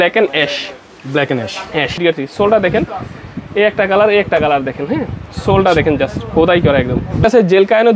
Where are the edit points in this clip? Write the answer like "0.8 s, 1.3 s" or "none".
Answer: 2.0 s, 7.2 s